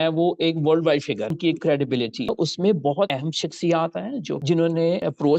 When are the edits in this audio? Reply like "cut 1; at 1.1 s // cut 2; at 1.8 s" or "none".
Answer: cut 1; at 1.4 s // cut 2; at 2.3 s